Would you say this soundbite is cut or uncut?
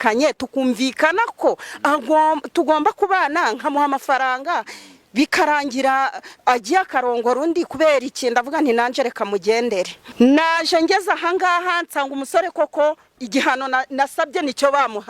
cut